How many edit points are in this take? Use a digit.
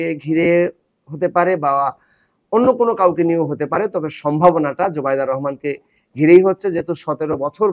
0